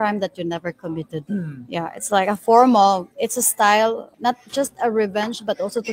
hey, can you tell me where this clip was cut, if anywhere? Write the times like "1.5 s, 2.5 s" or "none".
1.2 s, 3.1 s, 4.1 s